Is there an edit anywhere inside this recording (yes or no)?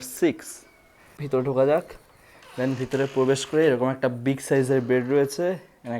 yes